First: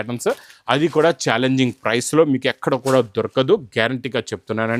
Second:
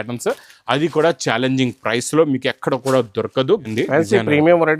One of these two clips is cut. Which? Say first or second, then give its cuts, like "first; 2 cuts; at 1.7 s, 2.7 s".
second; 1 cut; at 3.7 s